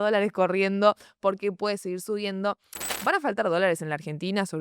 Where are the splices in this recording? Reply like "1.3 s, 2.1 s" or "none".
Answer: 3.1 s

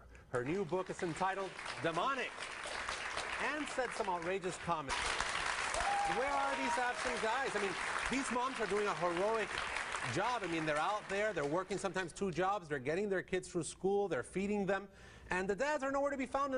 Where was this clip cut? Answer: none

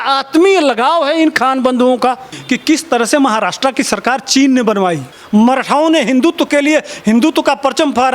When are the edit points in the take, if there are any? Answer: 2.3 s, 5.1 s

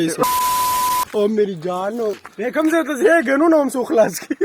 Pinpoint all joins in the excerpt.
1.1 s, 2.3 s

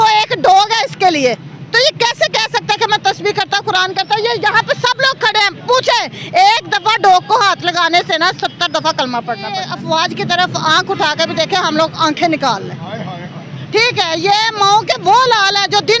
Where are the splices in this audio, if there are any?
9.7 s

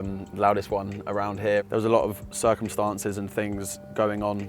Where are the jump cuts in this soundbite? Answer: 1.6 s

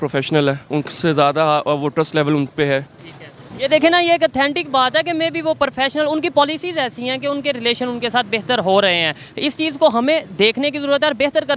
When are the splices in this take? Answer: none

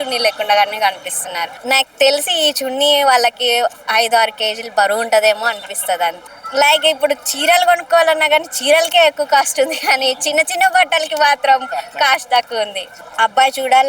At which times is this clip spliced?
1.5 s, 6.3 s, 12.9 s

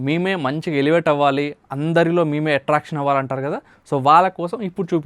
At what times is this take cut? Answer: none

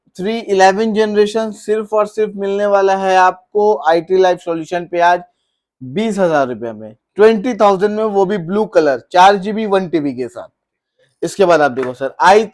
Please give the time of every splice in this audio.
none

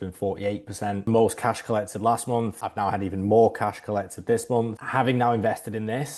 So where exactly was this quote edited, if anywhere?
1.0 s, 4.8 s

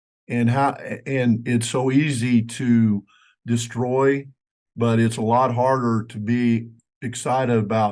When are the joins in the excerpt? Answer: 4.3 s

